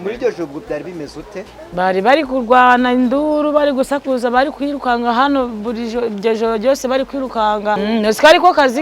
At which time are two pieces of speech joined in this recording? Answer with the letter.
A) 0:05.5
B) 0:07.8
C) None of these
B